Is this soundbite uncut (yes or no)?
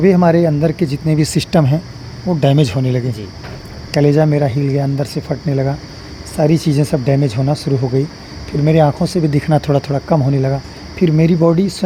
yes